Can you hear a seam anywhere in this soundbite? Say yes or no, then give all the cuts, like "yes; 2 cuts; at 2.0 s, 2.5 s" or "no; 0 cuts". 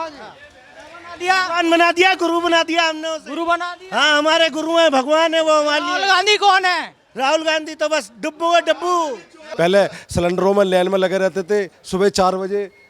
yes; 1 cut; at 9.4 s